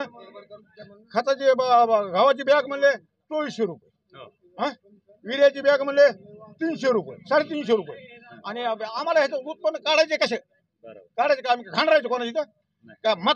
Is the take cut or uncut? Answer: uncut